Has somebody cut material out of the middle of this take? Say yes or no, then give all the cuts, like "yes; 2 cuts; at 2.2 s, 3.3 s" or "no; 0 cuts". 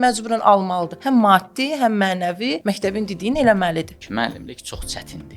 yes; 3 cuts; at 0.9 s, 2.6 s, 4.0 s